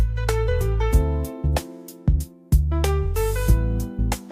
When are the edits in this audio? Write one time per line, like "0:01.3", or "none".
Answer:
none